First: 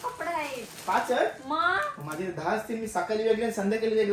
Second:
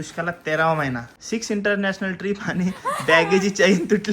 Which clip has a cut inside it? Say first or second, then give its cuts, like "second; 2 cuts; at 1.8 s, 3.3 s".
second; 1 cut; at 1.1 s